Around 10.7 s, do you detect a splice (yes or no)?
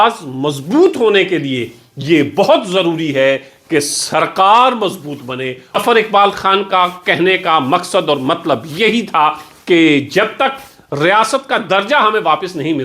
no